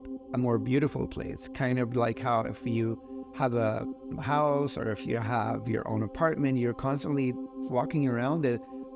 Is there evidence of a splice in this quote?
no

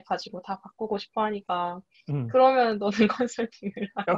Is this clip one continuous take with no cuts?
yes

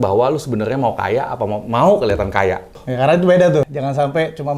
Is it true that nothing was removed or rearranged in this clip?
no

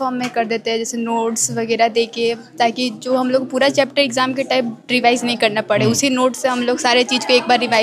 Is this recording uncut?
yes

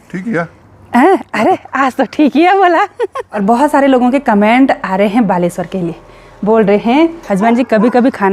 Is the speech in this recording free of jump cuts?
no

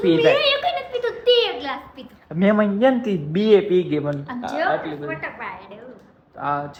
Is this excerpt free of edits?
yes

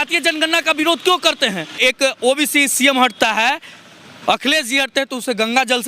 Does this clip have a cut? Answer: yes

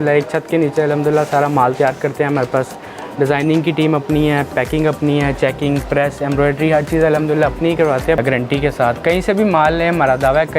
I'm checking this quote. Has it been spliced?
yes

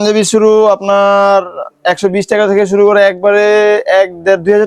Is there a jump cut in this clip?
no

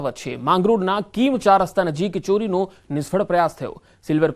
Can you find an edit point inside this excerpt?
yes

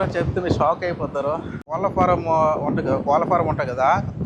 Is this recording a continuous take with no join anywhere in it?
yes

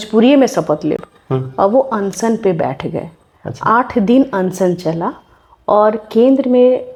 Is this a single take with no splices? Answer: yes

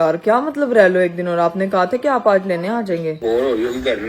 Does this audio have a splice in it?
yes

